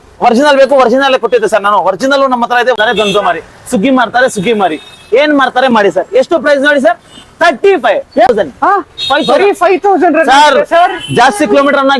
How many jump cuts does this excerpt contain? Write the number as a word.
two